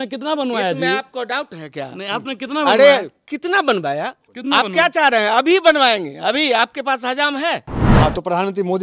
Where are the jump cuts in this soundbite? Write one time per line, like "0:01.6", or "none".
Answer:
0:07.8